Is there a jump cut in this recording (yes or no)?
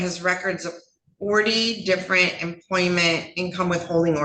no